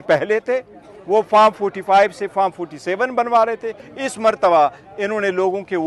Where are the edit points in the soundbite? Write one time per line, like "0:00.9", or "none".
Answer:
0:03.8